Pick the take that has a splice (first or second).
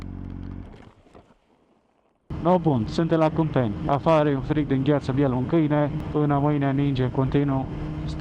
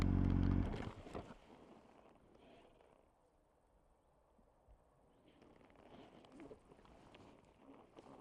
first